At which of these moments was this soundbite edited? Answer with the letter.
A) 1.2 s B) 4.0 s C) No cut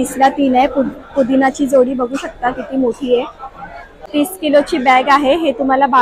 B